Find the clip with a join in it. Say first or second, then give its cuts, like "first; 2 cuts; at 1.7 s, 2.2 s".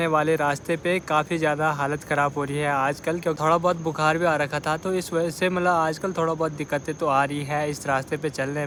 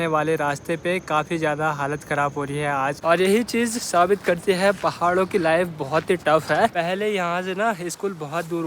second; 2 cuts; at 3.0 s, 6.7 s